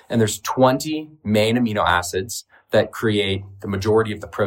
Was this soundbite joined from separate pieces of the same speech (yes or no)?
no